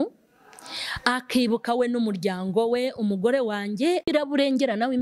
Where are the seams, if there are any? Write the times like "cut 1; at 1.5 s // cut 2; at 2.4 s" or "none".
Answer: cut 1; at 4.1 s